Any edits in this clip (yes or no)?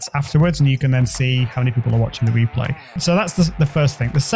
yes